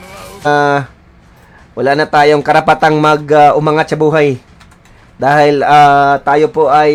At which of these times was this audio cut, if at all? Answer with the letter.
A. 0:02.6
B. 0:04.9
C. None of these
C